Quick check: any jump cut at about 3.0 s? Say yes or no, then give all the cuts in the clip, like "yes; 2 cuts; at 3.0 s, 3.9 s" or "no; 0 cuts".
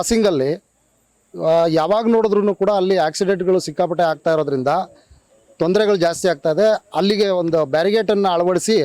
no; 0 cuts